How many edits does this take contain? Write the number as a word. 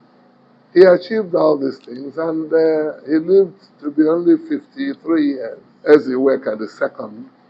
one